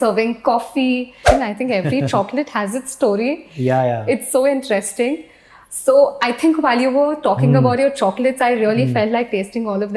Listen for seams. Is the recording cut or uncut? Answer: cut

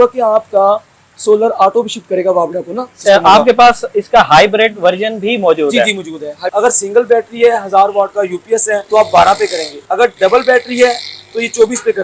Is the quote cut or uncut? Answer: cut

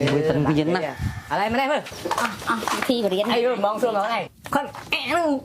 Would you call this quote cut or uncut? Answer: cut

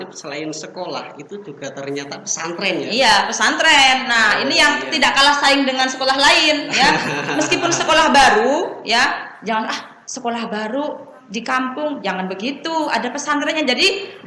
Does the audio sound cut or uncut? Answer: uncut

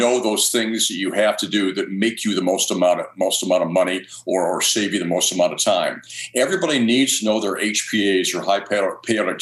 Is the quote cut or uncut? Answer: uncut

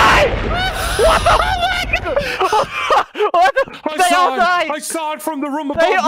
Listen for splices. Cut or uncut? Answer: uncut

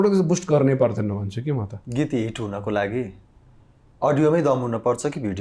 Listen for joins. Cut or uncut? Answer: cut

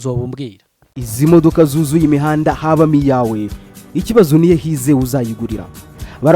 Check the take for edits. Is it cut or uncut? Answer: cut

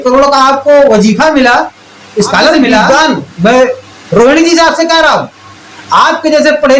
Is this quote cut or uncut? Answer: cut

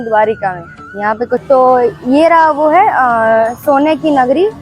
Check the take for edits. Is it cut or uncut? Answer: cut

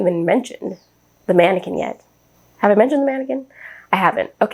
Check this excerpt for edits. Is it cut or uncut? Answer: uncut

